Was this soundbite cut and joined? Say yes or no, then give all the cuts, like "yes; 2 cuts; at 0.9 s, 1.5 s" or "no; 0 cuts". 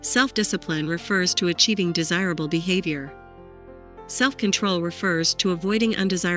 no; 0 cuts